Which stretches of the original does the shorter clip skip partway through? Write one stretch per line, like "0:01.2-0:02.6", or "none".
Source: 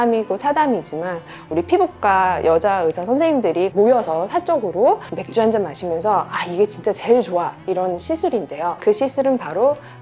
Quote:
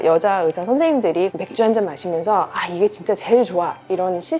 0:03.7-0:05.1